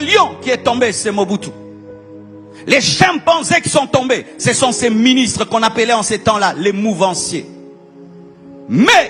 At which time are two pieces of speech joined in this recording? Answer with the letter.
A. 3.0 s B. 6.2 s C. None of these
C